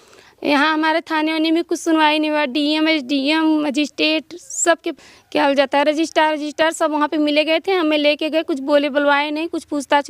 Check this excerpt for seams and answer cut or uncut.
cut